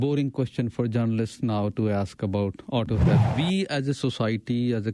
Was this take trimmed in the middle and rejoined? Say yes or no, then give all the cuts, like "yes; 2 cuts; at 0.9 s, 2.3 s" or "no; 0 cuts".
yes; 1 cut; at 3.3 s